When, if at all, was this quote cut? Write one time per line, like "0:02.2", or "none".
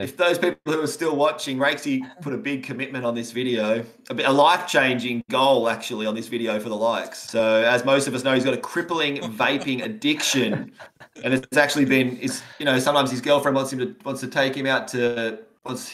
0:07.1